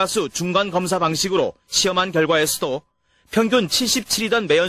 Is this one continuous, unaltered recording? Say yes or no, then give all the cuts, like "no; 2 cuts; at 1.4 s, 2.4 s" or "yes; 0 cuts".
yes; 0 cuts